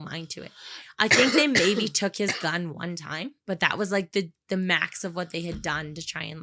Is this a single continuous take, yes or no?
no